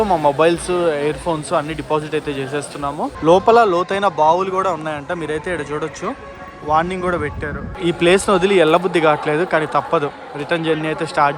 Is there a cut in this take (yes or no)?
yes